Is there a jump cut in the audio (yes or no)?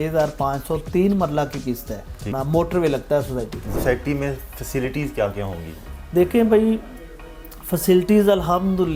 yes